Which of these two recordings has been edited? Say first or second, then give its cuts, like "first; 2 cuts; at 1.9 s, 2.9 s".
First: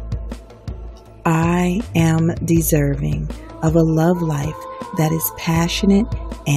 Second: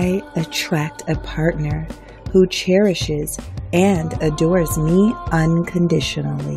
first; 1 cut; at 1.2 s